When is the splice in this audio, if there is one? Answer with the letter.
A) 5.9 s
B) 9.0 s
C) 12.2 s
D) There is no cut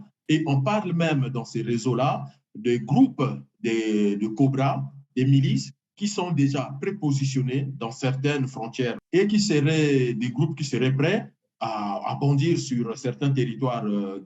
B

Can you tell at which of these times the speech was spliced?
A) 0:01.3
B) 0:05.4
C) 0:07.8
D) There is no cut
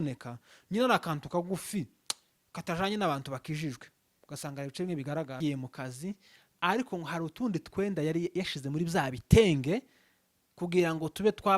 B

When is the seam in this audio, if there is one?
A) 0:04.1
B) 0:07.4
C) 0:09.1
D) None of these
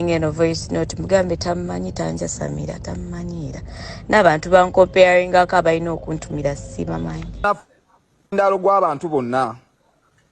B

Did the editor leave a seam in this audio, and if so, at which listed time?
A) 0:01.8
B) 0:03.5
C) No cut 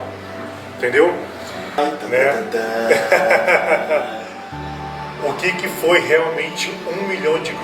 A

